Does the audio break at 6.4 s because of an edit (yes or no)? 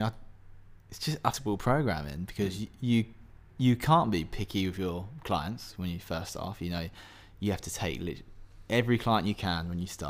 no